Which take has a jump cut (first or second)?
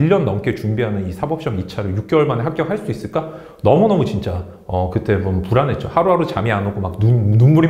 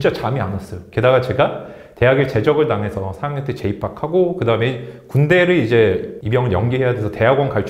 second